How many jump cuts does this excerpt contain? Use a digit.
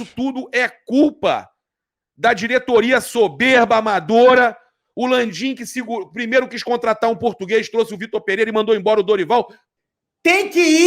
1